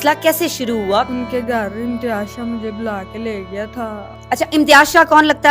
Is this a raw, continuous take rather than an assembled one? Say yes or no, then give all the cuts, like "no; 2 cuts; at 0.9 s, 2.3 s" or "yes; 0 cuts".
no; 1 cut; at 1.1 s